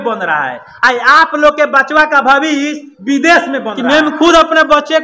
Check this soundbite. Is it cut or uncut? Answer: cut